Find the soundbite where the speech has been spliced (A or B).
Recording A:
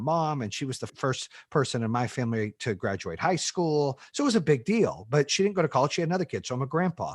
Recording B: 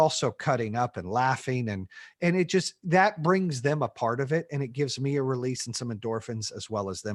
A